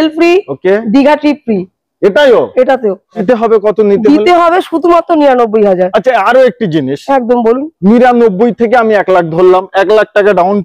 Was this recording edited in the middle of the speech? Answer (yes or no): yes